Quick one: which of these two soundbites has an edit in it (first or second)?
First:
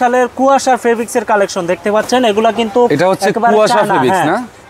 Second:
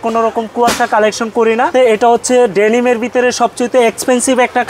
second